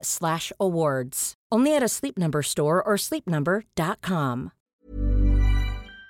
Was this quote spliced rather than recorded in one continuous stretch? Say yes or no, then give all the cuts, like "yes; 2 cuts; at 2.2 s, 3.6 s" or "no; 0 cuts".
yes; 1 cut; at 4.6 s